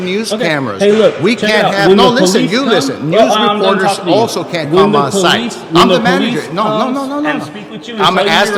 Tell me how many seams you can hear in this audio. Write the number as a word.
zero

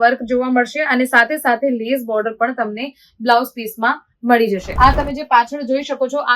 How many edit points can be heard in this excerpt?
one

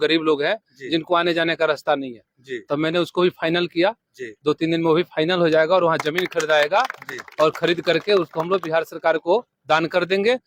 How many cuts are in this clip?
zero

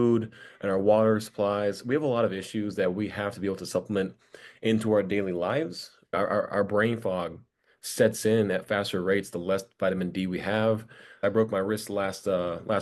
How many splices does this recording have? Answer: two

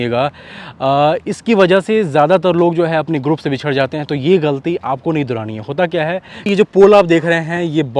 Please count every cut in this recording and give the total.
one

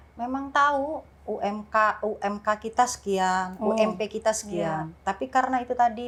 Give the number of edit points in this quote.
zero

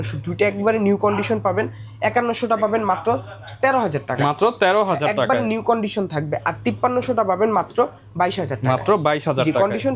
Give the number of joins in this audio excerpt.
zero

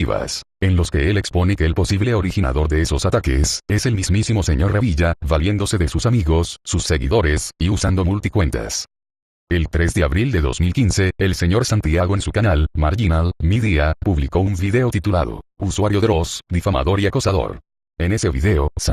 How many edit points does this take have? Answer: one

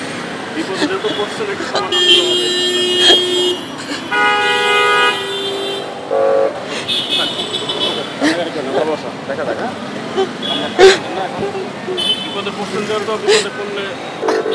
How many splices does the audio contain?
zero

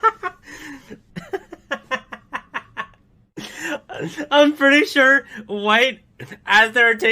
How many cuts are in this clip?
one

